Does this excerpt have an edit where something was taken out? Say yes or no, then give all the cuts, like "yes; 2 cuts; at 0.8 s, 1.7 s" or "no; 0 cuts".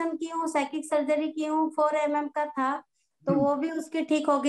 no; 0 cuts